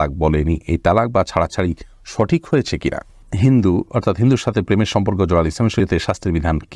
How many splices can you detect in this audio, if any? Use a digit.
2